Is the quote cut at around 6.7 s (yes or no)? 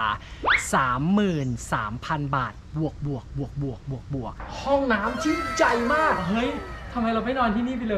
no